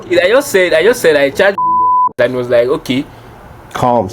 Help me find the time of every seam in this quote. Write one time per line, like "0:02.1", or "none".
none